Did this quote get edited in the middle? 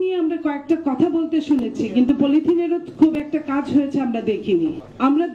no; 0 cuts

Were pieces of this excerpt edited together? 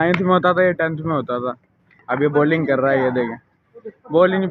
no; 0 cuts

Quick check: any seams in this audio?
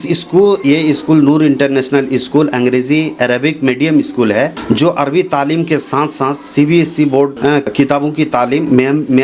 yes; 2 cuts; at 4.6 s, 7.7 s

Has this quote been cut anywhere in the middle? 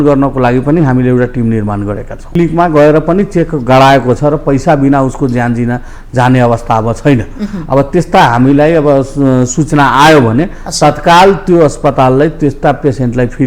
yes; 1 cut; at 2.4 s

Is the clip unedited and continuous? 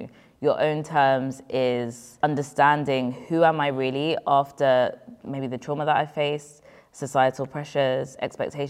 no; 1 cut; at 2.2 s

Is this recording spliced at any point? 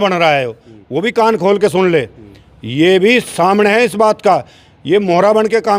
no; 0 cuts

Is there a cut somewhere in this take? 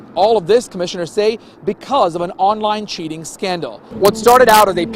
yes; 1 cut; at 3.8 s

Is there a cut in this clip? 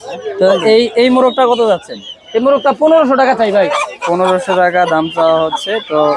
no; 0 cuts

